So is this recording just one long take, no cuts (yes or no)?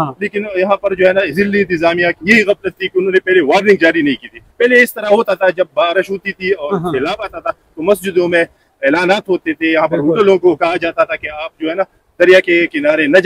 yes